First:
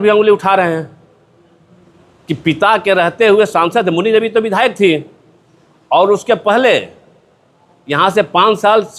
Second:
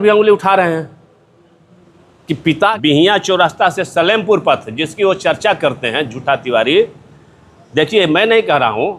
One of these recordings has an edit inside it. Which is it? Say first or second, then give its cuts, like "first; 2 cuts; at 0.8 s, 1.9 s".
second; 1 cut; at 2.8 s